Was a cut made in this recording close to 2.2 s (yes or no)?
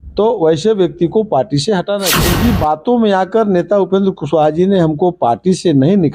yes